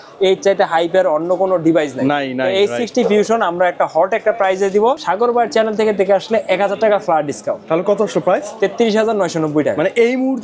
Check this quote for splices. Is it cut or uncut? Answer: cut